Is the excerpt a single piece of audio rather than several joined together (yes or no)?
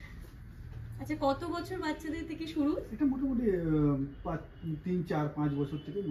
yes